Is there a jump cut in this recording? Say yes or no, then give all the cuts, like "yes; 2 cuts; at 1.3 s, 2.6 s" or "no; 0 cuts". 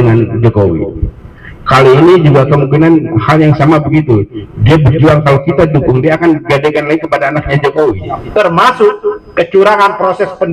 yes; 1 cut; at 8.1 s